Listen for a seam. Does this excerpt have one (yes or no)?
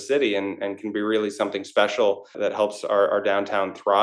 yes